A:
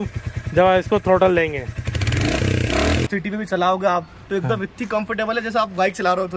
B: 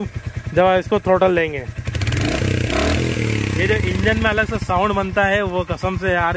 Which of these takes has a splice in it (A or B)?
A